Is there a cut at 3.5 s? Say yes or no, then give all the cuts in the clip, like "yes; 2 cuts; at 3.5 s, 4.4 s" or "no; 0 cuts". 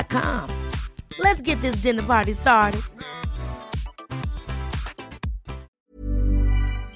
no; 1 cut; at 5.6 s